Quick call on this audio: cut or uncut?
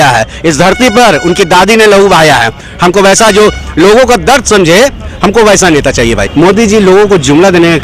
cut